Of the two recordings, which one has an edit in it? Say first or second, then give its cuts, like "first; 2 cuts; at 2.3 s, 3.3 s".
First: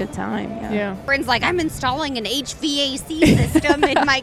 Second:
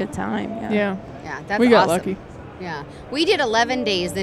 first; 1 cut; at 1.0 s